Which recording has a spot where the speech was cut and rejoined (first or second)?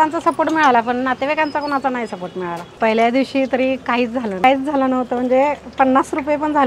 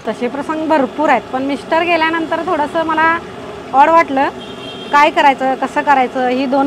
first